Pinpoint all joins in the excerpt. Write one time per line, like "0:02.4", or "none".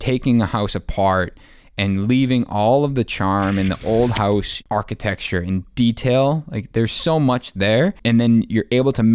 0:04.5
0:08.0